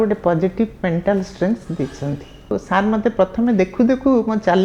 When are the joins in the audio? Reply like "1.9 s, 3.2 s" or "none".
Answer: 2.5 s